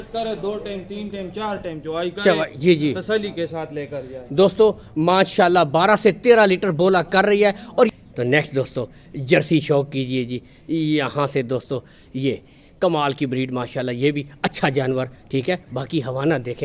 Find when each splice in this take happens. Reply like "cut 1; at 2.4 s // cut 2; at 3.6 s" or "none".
cut 1; at 7.9 s